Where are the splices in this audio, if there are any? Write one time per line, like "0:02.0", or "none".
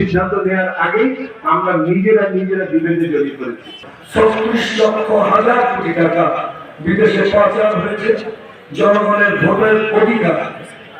0:03.9